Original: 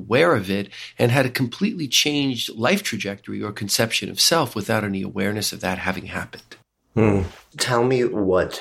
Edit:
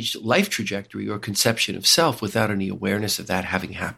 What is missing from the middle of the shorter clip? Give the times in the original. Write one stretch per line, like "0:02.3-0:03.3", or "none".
none